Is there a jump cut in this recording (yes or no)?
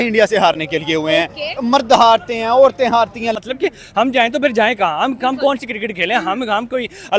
yes